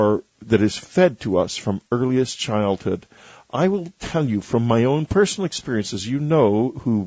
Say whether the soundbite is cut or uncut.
cut